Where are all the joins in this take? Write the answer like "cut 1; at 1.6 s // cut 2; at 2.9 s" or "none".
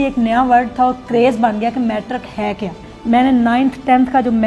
cut 1; at 2.9 s